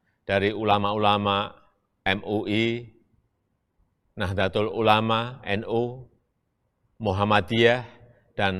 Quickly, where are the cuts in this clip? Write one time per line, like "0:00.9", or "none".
none